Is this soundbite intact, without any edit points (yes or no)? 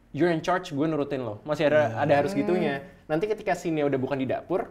yes